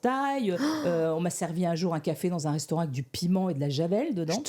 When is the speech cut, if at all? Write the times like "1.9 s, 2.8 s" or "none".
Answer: none

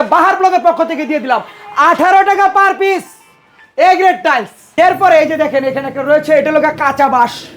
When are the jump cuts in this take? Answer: none

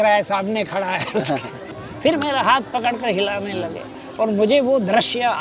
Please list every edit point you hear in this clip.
1.7 s

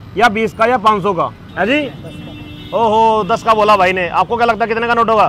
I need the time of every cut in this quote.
1.4 s

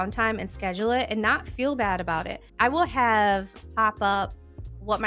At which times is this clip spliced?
none

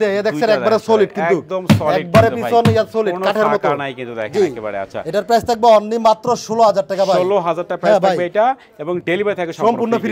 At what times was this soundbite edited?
none

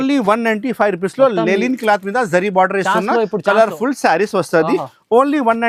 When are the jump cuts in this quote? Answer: none

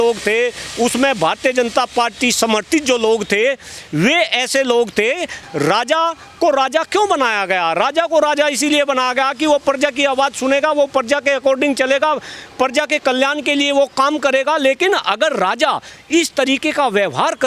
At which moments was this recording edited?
5.4 s

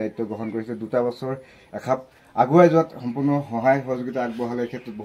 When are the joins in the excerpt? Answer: none

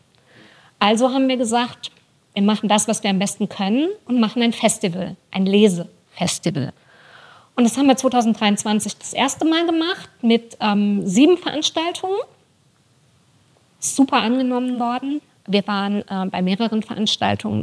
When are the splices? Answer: none

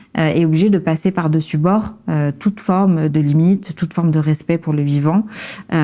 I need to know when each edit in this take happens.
3.1 s

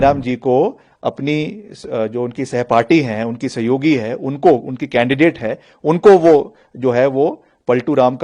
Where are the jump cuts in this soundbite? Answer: none

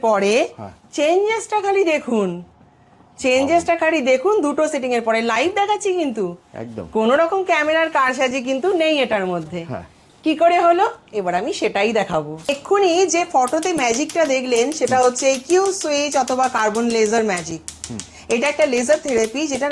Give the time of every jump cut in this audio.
none

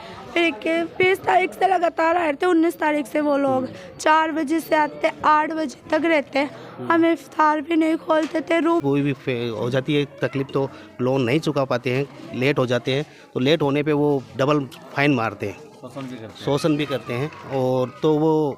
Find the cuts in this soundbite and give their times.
8.8 s

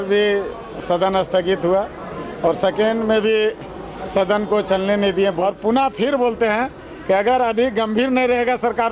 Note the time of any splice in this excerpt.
5.4 s

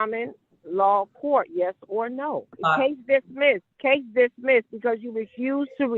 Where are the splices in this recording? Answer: 2.5 s, 3.7 s

